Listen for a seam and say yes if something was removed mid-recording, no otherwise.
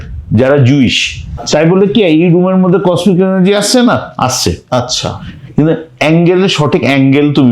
yes